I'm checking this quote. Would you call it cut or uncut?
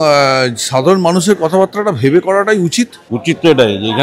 cut